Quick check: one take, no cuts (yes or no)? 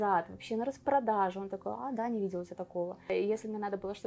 no